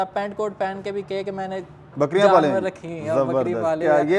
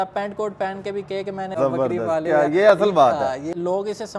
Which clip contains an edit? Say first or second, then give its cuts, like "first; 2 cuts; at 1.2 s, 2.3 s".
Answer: second; 2 cuts; at 1.5 s, 3.3 s